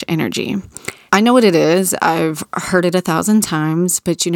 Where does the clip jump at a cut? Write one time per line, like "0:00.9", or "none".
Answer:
0:01.0